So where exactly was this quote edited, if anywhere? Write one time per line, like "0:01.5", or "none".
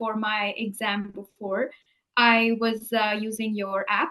none